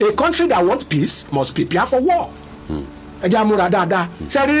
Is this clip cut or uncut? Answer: uncut